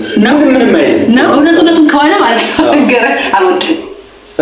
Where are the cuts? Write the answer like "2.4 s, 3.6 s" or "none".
1.3 s